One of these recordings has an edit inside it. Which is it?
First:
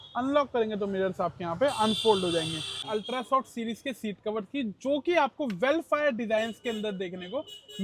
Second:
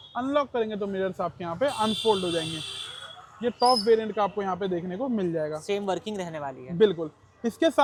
first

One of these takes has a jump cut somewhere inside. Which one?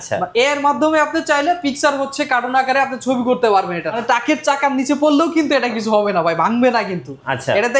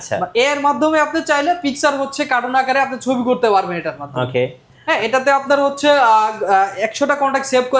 first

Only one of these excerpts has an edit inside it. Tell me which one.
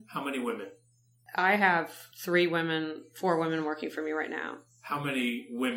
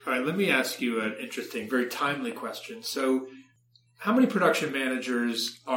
first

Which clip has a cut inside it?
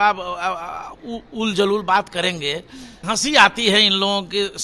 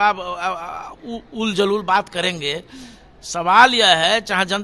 first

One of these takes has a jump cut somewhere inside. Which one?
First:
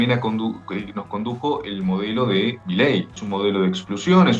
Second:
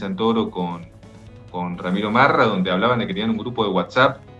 first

